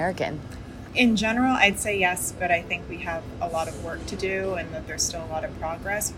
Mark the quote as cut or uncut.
uncut